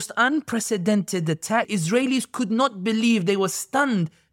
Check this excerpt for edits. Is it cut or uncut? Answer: cut